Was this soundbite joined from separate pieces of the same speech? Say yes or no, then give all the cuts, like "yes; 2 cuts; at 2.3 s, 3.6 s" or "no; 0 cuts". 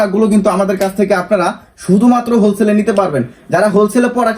no; 0 cuts